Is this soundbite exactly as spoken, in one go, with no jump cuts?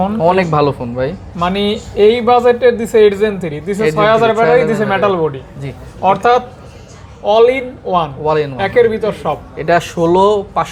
yes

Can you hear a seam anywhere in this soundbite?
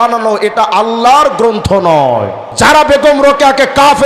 yes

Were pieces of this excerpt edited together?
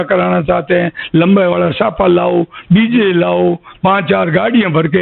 no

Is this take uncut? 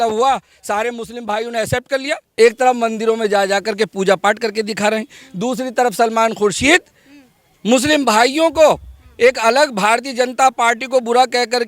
no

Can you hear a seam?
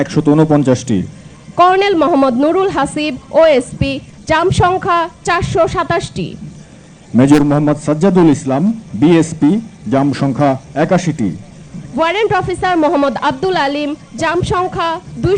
no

